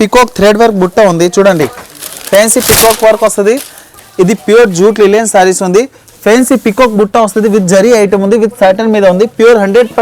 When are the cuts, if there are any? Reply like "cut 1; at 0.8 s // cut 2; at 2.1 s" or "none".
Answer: cut 1; at 3.9 s

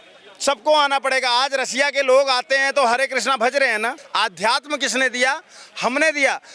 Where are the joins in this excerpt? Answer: cut 1; at 4.0 s

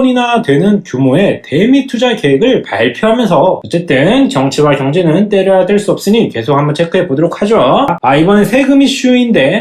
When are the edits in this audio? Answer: cut 1; at 3.6 s // cut 2; at 8.0 s

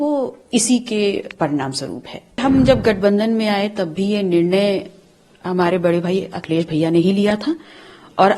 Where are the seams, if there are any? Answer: cut 1; at 2.4 s

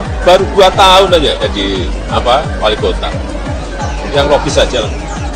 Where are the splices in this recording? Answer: none

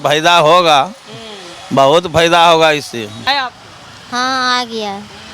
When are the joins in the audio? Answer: cut 1; at 3.3 s

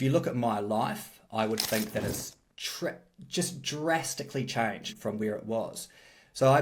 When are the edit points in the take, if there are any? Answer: cut 1; at 4.9 s

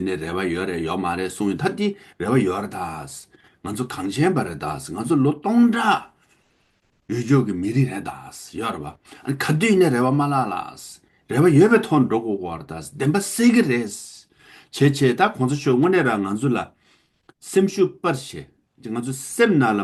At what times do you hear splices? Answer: none

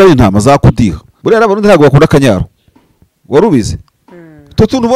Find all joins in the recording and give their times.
cut 1; at 1.1 s

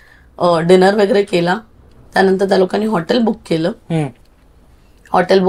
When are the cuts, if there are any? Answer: none

